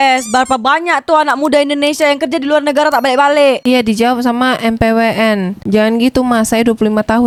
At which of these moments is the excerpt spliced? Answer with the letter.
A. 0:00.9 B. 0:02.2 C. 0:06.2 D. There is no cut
D